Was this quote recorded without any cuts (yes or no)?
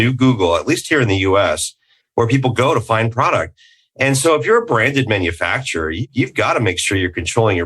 no